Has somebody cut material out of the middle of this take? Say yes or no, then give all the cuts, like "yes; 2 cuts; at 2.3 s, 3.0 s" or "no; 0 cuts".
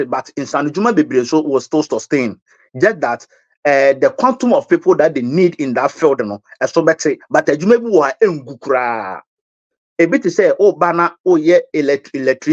no; 0 cuts